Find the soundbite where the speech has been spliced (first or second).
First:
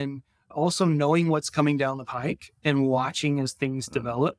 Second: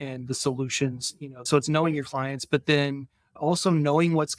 second